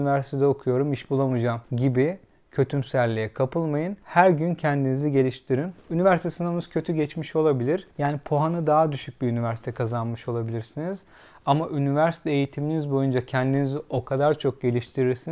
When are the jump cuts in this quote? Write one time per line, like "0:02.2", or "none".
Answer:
0:01.7
0:04.0
0:07.9